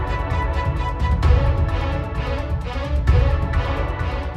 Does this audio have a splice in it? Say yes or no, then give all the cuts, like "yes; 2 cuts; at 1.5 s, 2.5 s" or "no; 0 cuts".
yes; 1 cut; at 3.0 s